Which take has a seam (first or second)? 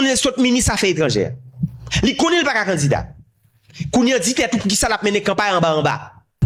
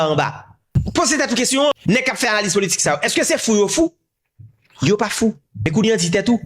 second